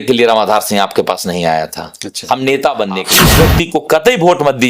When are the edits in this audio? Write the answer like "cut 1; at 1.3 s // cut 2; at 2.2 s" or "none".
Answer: cut 1; at 3.2 s